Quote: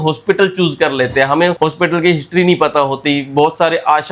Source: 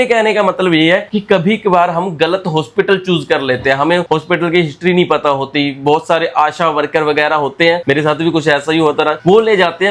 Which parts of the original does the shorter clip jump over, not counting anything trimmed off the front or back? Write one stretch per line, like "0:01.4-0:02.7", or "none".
none